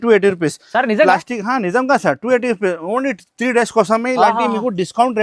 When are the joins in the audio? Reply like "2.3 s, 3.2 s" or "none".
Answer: none